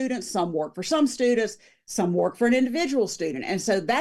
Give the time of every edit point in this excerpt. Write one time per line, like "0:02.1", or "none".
none